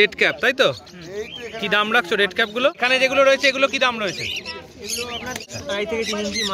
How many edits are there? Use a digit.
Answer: 2